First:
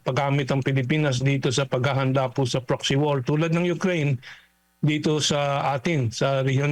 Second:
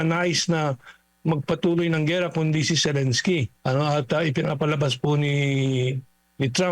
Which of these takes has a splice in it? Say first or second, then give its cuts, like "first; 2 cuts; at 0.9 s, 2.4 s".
second; 1 cut; at 3.5 s